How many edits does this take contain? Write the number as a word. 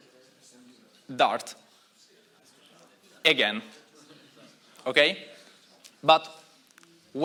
zero